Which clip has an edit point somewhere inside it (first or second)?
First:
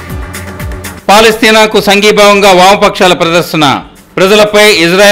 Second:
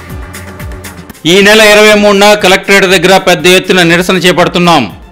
first